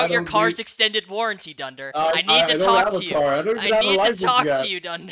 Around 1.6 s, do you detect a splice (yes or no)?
no